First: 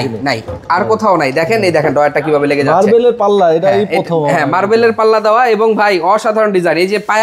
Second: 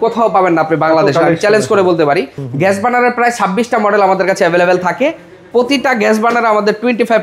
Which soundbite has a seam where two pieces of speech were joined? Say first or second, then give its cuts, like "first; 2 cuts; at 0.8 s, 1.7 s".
second; 1 cut; at 2.4 s